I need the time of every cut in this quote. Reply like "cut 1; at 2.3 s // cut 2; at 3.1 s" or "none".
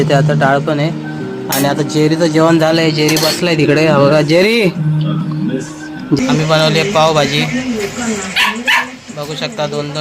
cut 1; at 6.2 s